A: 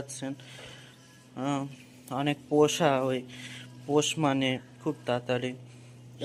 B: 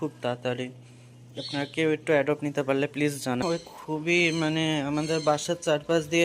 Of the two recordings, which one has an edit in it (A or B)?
B